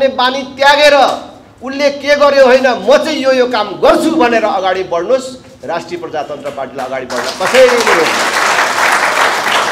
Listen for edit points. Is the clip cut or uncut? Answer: uncut